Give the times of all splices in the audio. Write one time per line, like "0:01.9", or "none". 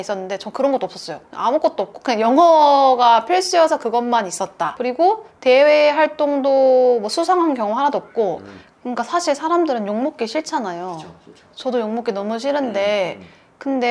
0:04.7
0:08.6